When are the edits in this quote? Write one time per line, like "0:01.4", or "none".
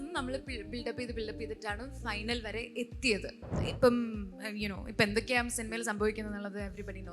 0:03.6